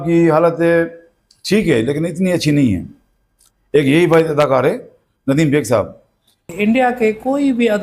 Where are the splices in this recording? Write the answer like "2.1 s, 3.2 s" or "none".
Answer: 6.5 s